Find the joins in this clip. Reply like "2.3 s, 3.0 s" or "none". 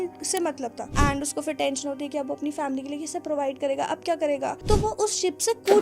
0.8 s, 4.6 s